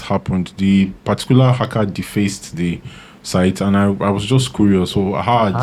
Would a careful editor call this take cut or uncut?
uncut